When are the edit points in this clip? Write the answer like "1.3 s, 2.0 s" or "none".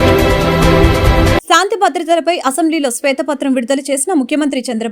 1.3 s